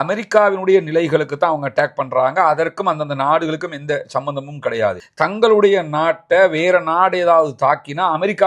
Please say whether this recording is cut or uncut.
cut